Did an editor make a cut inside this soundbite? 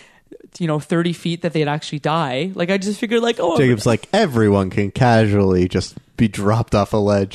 no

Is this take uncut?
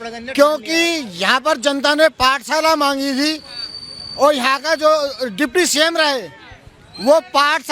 yes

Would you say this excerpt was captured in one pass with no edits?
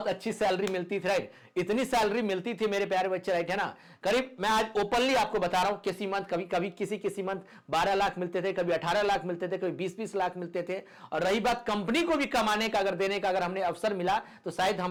yes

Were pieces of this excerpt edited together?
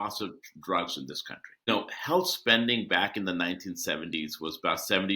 yes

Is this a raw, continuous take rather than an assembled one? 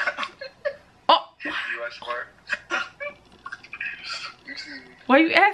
yes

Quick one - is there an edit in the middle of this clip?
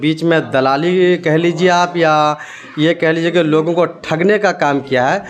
no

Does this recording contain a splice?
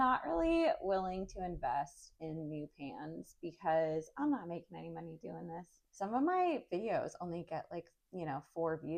yes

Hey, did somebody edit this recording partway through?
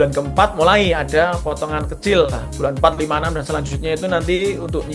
no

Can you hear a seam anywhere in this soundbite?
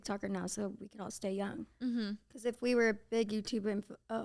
no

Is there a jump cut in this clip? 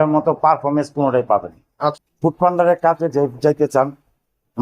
yes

